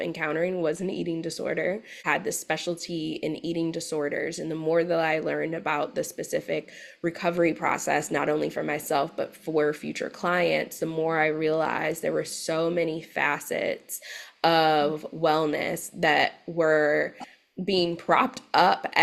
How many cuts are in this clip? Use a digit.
1